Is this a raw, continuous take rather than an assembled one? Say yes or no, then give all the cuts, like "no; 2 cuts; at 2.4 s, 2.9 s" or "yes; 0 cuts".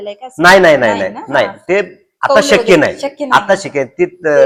yes; 0 cuts